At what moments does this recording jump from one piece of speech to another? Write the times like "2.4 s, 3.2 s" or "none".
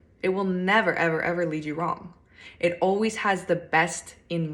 none